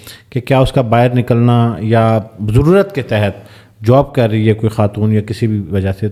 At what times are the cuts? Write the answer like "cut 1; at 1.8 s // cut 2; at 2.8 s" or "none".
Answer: none